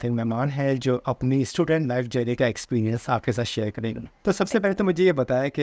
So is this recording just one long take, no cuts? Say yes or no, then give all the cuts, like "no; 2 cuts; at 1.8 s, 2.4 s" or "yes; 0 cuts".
no; 1 cut; at 4.1 s